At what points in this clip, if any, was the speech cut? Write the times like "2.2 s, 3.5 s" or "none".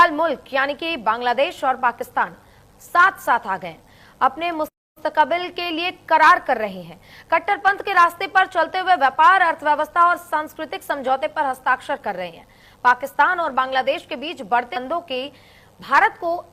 none